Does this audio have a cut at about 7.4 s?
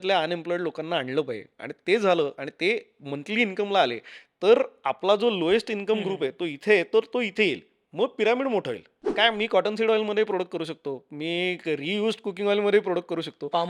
no; 1 cut; at 9.1 s

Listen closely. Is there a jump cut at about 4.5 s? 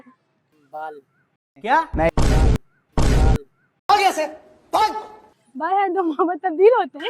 no; 0 cuts

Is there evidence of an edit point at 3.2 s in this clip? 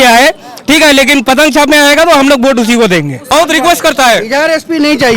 yes; 1 cut; at 3.2 s

